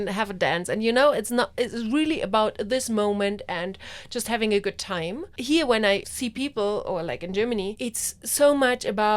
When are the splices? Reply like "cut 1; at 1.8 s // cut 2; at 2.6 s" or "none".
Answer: cut 1; at 5.3 s // cut 2; at 6.1 s // cut 3; at 7.8 s